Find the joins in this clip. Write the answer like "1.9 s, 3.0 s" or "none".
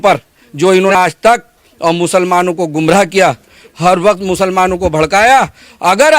0.9 s